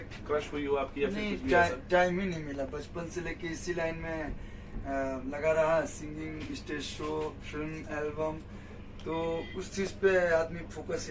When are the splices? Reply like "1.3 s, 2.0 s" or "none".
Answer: none